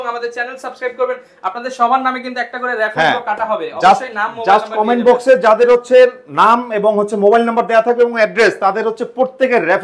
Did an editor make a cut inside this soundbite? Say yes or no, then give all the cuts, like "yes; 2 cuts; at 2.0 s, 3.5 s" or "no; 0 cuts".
no; 0 cuts